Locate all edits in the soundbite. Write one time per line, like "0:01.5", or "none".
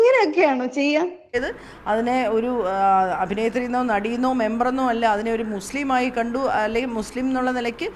0:01.3